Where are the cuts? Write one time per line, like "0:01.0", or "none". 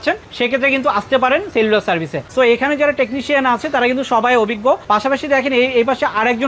none